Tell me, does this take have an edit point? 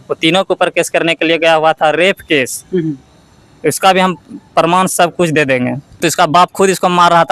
yes; 1 cut; at 6.0 s

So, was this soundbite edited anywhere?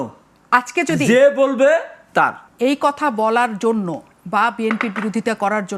yes; 1 cut; at 2.4 s

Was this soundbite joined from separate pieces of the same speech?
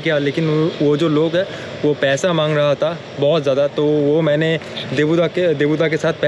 no; 0 cuts

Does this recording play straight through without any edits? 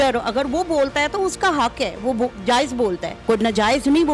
no; 1 cut; at 3.1 s

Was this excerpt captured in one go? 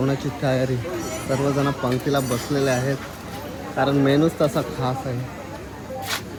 yes; 0 cuts

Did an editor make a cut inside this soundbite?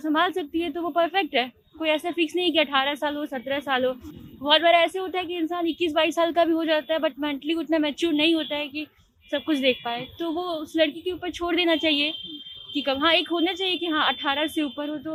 no; 0 cuts

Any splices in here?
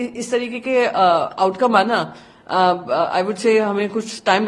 no; 0 cuts

